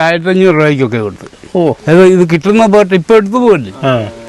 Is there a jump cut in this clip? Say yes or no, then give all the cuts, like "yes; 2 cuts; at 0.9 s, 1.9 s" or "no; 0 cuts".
yes; 1 cut; at 1.8 s